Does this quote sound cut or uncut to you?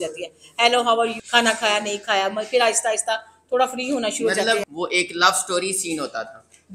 cut